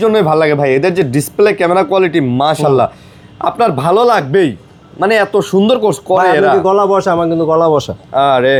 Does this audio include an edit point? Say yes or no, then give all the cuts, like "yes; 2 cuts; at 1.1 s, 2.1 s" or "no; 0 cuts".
no; 0 cuts